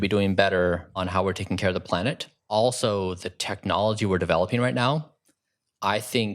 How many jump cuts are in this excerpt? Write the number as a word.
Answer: two